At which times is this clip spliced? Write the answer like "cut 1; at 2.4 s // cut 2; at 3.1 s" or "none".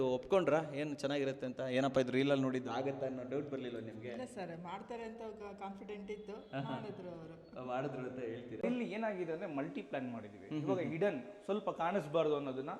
cut 1; at 8.6 s

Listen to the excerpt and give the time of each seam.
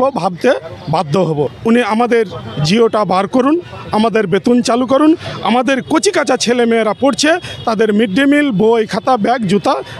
none

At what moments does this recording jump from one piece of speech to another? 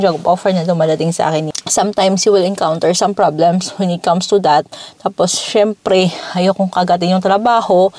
cut 1; at 1.6 s

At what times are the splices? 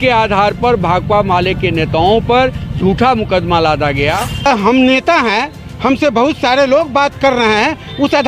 cut 1; at 4.5 s

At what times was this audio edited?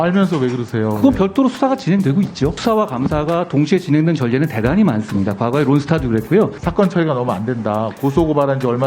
cut 1; at 2.6 s // cut 2; at 6.6 s

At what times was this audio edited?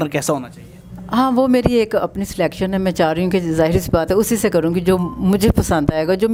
none

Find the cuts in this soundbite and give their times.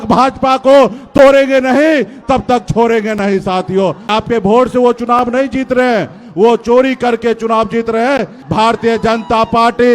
cut 1; at 4.1 s // cut 2; at 8.3 s

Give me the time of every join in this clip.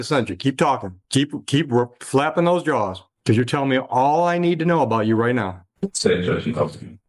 none

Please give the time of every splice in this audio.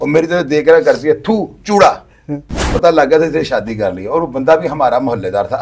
cut 1; at 2.7 s

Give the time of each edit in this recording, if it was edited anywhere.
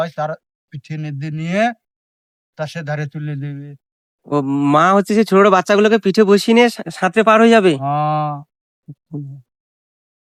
none

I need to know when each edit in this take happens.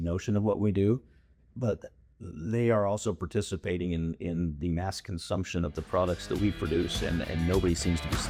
none

